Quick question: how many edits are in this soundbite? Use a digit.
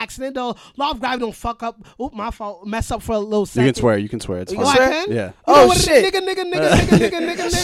0